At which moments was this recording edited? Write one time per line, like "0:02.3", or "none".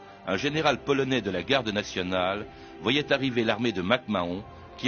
0:01.9